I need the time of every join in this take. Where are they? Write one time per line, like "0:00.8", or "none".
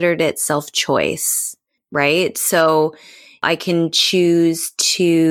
0:01.8
0:03.4